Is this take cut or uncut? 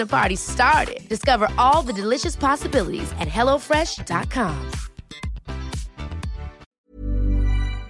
cut